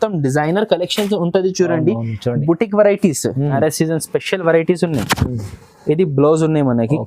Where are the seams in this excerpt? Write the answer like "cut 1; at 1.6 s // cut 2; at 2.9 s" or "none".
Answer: cut 1; at 3.5 s